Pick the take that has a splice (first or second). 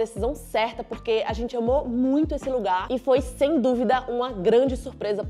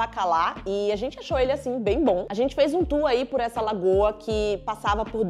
second